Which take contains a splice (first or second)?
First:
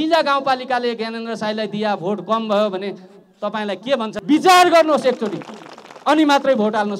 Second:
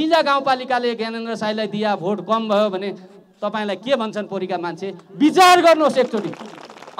first